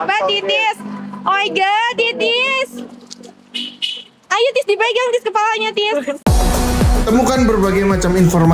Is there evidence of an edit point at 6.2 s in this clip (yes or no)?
yes